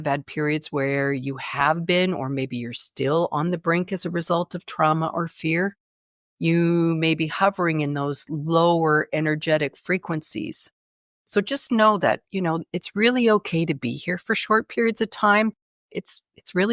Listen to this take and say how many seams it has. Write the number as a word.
zero